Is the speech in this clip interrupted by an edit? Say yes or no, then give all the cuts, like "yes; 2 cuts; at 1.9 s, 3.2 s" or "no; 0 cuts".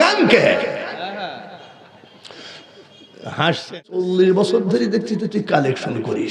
yes; 1 cut; at 4.1 s